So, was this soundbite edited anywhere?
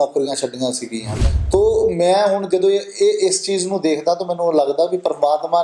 yes; 1 cut; at 1.0 s

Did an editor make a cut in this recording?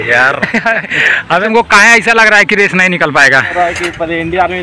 yes; 2 cuts; at 1.4 s, 3.5 s

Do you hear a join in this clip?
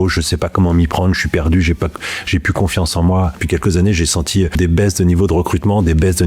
yes; 2 cuts; at 3.4 s, 4.6 s

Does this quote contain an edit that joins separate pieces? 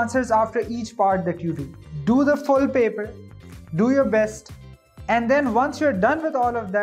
no; 0 cuts

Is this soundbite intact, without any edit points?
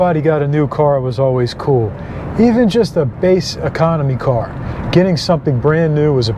yes; 0 cuts

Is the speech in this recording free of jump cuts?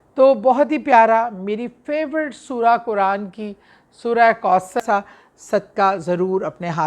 no; 1 cut; at 4.8 s

